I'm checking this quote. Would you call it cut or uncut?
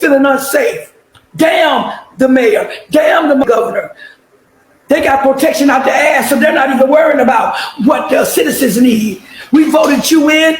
uncut